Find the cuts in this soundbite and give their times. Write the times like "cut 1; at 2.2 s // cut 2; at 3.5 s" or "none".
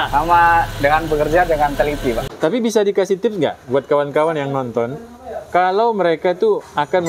cut 1; at 2.3 s